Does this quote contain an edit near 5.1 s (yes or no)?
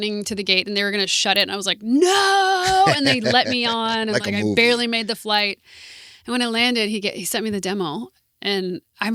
no